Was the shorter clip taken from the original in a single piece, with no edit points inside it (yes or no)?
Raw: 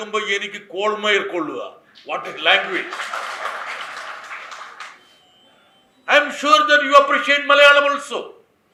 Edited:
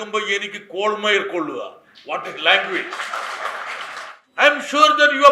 no